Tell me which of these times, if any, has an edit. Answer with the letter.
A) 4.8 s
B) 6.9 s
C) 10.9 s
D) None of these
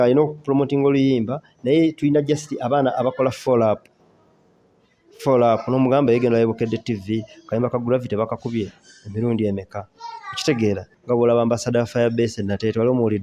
C